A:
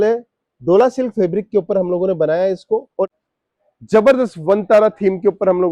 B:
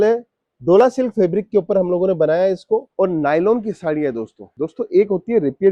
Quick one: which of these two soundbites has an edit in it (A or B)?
A